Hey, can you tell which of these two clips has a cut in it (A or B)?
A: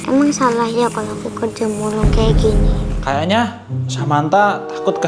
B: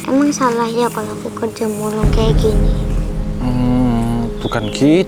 A